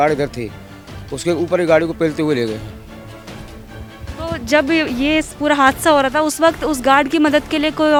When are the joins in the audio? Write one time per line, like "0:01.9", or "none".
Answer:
none